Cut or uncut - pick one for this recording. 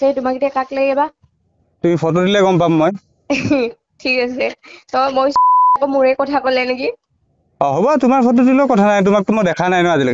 cut